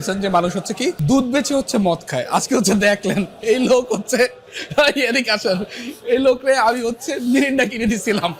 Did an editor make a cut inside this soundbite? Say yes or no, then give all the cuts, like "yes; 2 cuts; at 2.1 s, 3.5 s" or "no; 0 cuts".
yes; 1 cut; at 1.0 s